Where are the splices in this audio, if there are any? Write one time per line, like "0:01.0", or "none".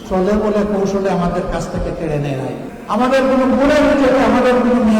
0:02.7

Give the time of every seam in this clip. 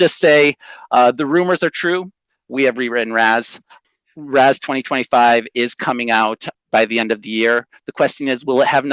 0:03.8
0:06.5

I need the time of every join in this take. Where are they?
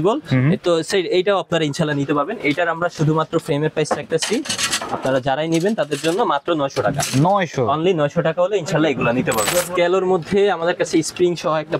0:09.5

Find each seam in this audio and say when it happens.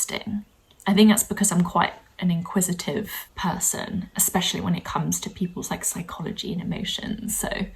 0:03.2

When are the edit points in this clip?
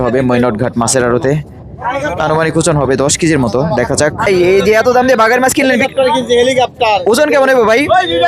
0:04.3

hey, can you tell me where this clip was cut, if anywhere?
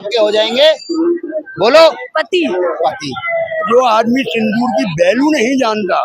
0:03.7

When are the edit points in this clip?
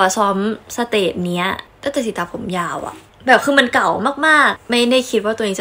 0:01.6
0:04.6

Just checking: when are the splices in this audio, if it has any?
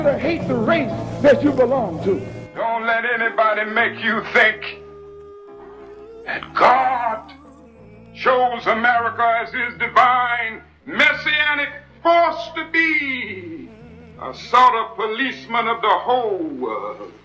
0:02.4

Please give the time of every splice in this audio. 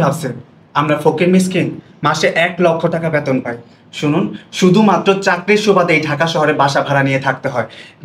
none

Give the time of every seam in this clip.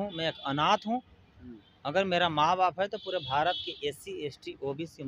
none

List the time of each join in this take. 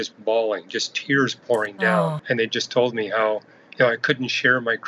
0:02.2

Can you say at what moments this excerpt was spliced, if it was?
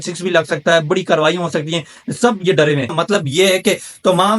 0:02.9

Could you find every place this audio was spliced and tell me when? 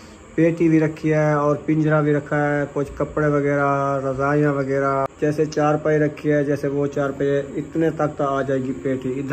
0:05.1

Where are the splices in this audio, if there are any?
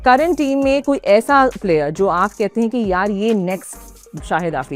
none

